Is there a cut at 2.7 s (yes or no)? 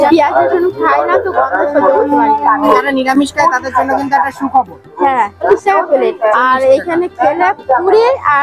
no